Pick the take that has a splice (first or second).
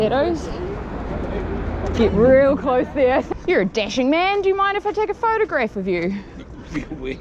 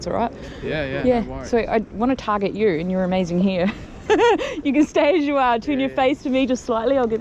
first